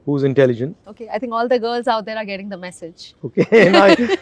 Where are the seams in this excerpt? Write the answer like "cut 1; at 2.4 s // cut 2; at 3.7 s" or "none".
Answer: cut 1; at 0.9 s